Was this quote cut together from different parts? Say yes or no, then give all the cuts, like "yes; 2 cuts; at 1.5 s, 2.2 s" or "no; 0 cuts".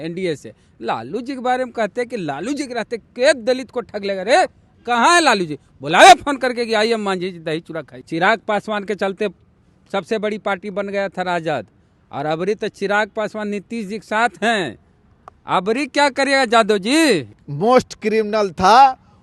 yes; 3 cuts; at 4.7 s, 7.9 s, 17.3 s